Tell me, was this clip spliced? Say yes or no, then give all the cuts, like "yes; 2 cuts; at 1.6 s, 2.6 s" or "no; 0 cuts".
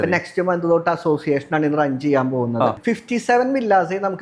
yes; 1 cut; at 2.8 s